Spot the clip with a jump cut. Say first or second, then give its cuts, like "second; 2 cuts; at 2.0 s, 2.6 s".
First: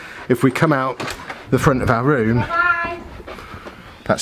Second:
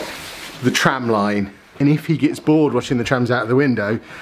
second; 1 cut; at 1.8 s